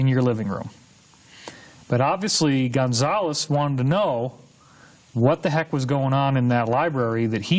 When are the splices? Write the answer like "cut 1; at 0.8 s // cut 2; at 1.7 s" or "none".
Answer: cut 1; at 4.3 s